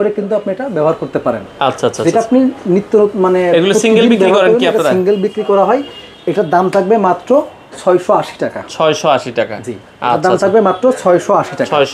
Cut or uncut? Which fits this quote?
uncut